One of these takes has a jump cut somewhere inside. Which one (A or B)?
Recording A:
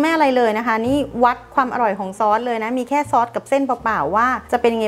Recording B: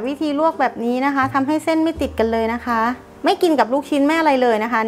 B